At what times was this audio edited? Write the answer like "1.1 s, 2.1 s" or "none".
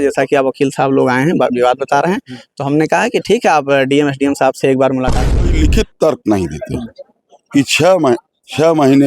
5.5 s